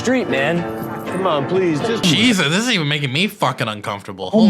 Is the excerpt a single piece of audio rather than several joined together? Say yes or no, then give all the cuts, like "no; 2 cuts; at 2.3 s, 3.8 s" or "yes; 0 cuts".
no; 1 cut; at 2.0 s